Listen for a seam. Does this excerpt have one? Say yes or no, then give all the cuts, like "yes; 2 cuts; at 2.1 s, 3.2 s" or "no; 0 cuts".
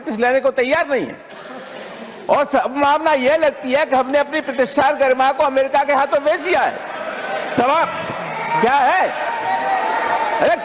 no; 0 cuts